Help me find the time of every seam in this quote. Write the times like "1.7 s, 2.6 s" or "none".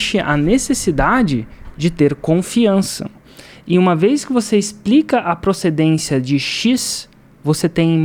none